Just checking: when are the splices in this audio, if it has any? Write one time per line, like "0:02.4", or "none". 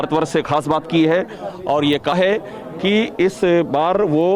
0:02.2